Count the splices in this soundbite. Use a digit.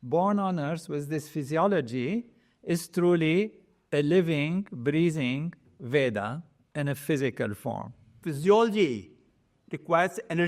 1